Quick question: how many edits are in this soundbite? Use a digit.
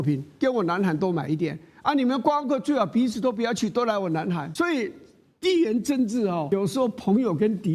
2